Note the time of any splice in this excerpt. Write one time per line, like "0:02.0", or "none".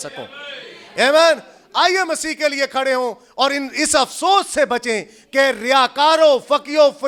none